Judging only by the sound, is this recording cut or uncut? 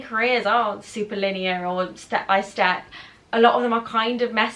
uncut